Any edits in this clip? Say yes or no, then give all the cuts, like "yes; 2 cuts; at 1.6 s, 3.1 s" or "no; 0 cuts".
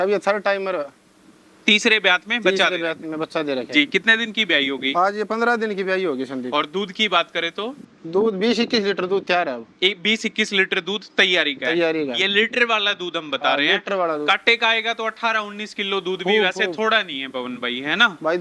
no; 0 cuts